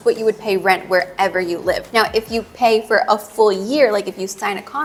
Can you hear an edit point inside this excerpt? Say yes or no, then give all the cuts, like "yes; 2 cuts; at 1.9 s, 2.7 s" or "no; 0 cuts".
no; 0 cuts